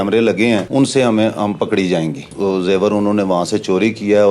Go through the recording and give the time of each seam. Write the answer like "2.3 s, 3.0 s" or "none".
2.3 s